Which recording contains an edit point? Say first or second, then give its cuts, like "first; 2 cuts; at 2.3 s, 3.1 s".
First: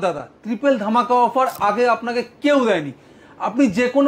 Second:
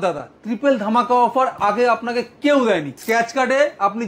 second; 1 cut; at 2.9 s